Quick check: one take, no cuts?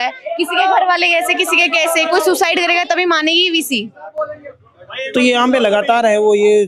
yes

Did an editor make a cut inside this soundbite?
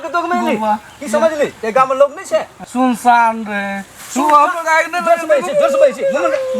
yes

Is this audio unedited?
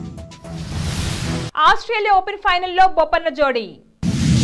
yes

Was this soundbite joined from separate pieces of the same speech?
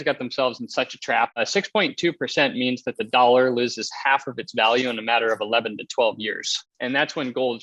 yes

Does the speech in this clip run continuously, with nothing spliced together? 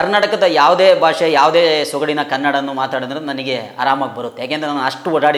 yes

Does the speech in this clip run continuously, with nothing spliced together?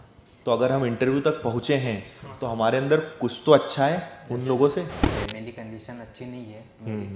no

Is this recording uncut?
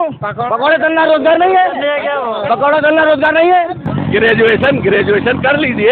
no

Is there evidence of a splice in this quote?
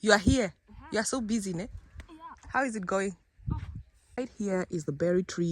yes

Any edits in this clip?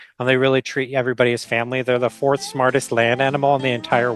no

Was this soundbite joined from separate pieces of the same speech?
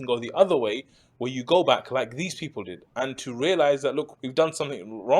yes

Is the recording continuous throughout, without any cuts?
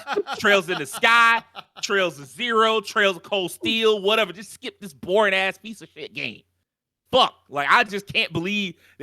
yes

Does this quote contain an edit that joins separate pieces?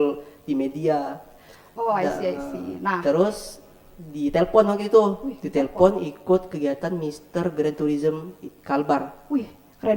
no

